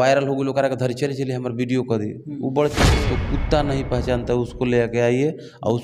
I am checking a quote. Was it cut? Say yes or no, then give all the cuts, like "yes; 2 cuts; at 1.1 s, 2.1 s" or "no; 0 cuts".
yes; 1 cut; at 3.0 s